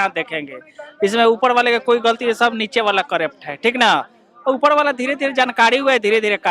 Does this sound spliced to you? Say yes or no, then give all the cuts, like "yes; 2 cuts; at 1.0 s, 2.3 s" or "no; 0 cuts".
no; 0 cuts